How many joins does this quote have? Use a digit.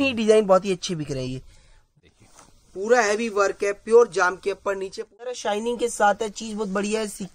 2